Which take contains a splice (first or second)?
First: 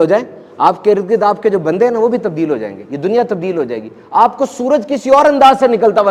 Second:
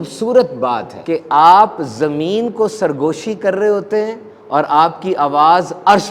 second